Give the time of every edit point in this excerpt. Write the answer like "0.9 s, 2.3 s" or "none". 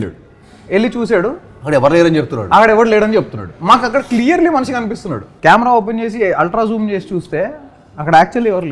5.3 s